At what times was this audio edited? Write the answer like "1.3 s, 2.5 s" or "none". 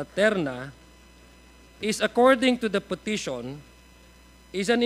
3.0 s